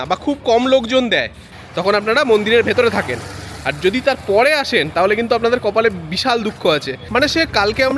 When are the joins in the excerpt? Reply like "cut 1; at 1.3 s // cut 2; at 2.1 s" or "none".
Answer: cut 1; at 1.6 s // cut 2; at 7.0 s